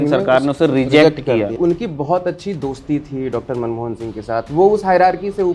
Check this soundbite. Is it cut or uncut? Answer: cut